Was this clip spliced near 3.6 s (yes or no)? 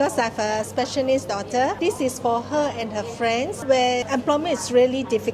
yes